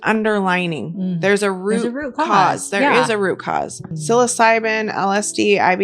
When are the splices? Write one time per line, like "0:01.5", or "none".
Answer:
0:03.9